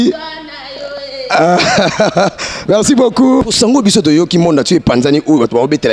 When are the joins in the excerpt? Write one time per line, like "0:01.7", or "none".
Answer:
0:03.4